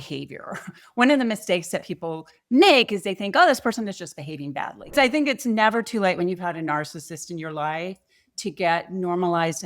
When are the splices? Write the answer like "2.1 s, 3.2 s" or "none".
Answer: 4.9 s